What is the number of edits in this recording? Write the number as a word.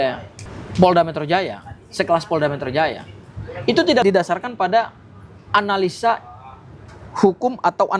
zero